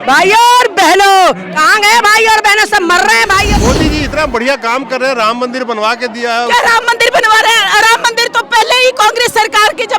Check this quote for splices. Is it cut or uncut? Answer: cut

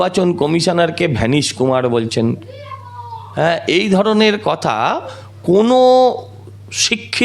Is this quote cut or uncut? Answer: uncut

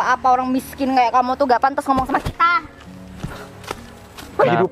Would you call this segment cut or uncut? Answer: uncut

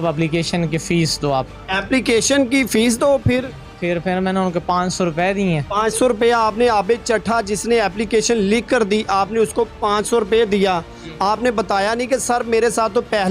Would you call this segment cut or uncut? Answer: uncut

